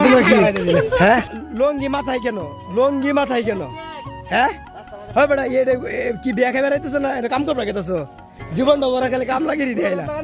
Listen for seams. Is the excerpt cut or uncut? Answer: cut